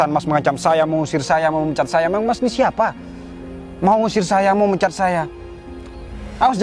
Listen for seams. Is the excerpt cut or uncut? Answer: uncut